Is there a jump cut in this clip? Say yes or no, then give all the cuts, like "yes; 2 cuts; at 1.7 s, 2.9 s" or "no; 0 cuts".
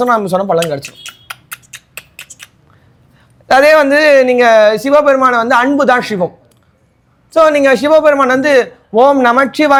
no; 0 cuts